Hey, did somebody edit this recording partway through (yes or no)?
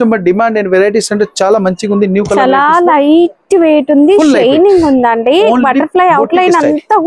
no